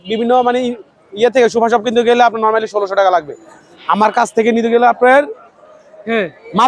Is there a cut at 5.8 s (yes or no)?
no